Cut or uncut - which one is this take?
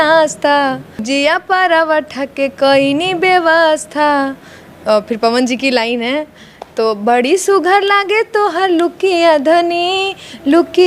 cut